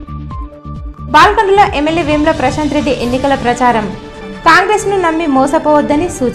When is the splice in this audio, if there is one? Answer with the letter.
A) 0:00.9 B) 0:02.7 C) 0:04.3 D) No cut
D